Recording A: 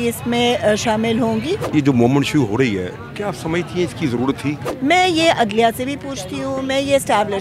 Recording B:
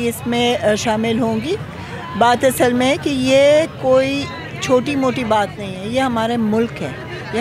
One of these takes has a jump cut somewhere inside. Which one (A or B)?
A